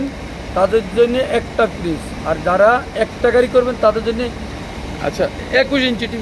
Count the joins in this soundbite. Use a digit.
0